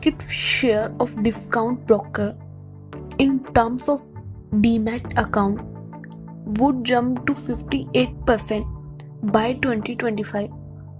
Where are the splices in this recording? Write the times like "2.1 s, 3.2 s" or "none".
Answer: none